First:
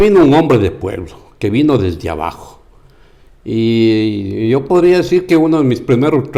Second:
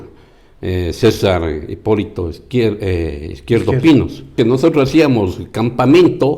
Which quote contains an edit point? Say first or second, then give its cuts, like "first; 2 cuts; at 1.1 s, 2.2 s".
second; 1 cut; at 4.3 s